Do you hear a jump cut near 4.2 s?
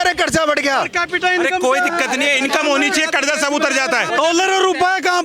yes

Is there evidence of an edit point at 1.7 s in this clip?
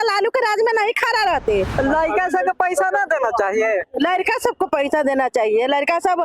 yes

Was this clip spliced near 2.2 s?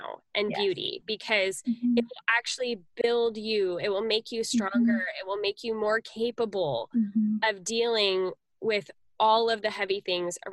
no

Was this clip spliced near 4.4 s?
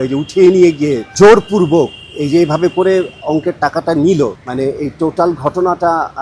yes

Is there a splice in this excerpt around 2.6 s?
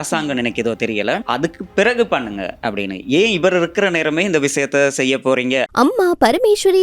no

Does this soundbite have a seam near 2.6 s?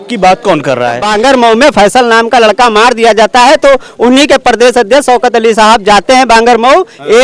no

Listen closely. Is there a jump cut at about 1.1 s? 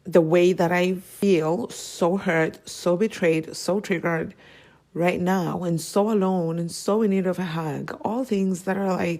yes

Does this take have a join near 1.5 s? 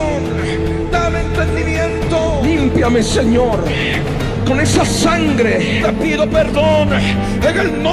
no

